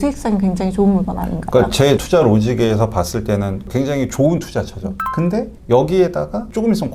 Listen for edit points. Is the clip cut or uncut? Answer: uncut